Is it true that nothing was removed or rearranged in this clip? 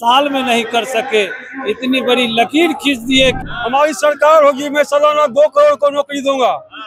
no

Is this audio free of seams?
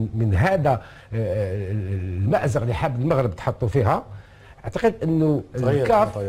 yes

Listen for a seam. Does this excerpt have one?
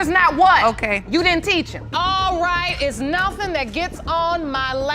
yes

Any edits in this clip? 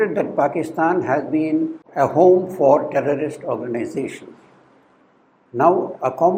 yes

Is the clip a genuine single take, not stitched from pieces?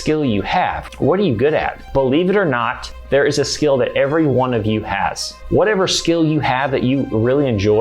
no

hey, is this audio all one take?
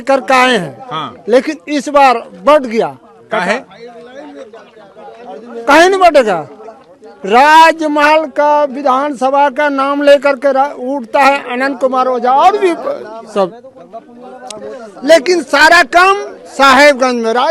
yes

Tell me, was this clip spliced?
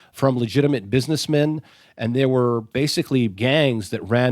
yes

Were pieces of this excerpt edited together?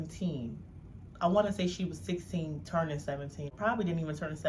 yes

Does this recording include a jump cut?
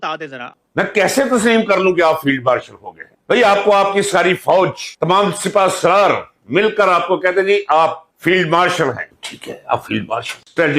yes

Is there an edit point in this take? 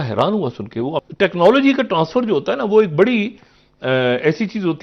yes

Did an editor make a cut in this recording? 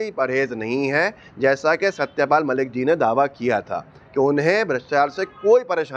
no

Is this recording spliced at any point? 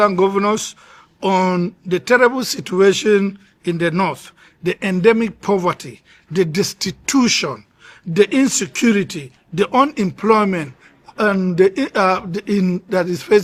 no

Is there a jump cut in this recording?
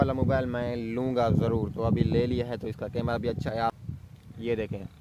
yes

